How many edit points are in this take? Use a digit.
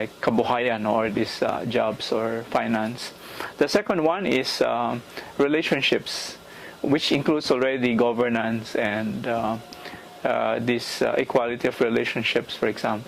1